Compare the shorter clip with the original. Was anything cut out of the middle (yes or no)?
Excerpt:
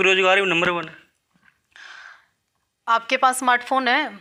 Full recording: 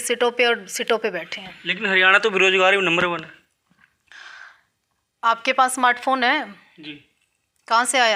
no